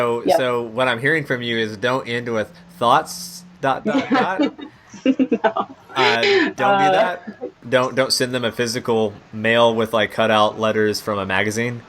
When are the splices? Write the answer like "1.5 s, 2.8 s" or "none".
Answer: 7.6 s